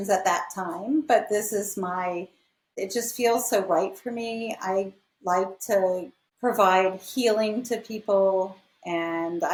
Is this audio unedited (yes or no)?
yes